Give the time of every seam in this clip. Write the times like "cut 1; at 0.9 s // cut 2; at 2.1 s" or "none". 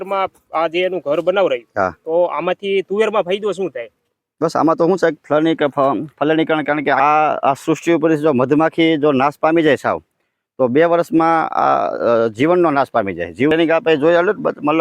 cut 1; at 7.0 s // cut 2; at 13.5 s